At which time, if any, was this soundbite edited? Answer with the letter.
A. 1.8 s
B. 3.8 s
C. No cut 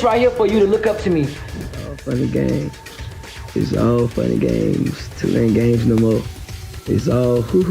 A